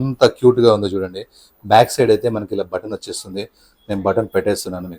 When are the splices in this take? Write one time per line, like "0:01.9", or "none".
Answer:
none